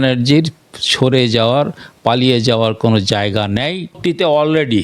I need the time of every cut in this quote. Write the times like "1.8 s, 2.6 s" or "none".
3.9 s